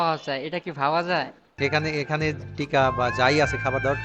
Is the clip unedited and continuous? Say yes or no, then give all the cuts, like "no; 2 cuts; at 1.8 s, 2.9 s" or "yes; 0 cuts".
no; 1 cut; at 1.4 s